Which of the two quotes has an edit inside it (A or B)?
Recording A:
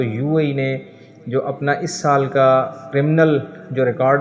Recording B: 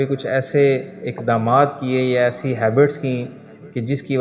A